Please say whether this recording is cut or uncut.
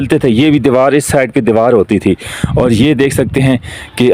uncut